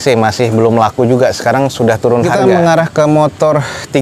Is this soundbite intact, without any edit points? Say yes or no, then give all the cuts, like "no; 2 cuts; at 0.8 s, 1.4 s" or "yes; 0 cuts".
no; 1 cut; at 2.3 s